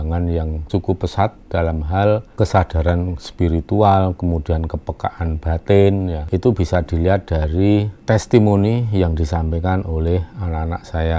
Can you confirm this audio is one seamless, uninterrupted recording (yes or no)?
yes